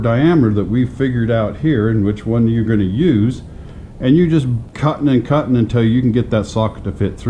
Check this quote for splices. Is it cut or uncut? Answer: cut